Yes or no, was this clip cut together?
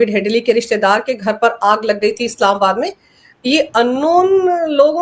no